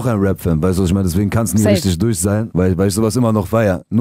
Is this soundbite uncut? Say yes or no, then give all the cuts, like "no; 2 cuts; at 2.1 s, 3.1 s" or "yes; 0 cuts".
no; 1 cut; at 2.5 s